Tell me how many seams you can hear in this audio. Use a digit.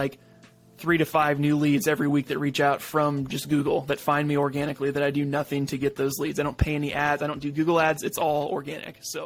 0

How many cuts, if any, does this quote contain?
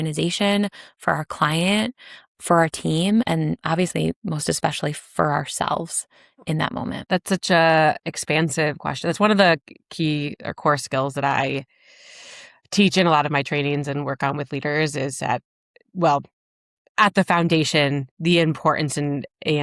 2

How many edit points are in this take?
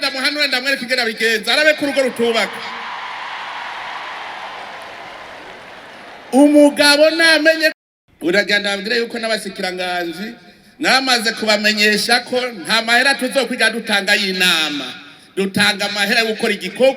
1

